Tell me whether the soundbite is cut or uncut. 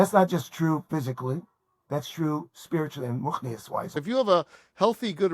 cut